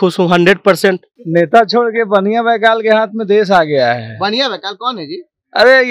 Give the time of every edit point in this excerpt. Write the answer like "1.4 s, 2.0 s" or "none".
1.1 s